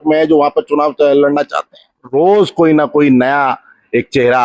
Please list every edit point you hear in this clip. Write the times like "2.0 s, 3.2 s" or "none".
2.1 s